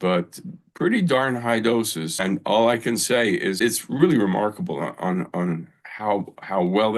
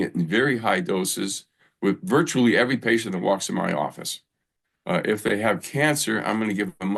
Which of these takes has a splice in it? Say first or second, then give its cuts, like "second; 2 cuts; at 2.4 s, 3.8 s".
first; 2 cuts; at 2.2 s, 3.6 s